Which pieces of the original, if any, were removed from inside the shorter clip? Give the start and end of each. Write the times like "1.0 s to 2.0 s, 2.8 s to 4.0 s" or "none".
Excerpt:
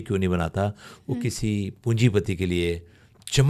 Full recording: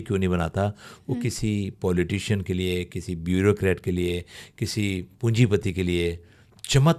1.7 s to 5.1 s